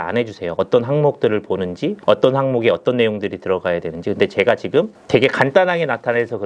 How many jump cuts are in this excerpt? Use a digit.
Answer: 2